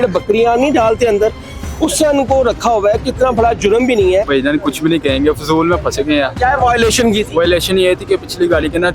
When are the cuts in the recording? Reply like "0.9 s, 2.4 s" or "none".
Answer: 4.3 s, 6.3 s